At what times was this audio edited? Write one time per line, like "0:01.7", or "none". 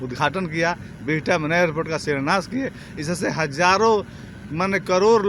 none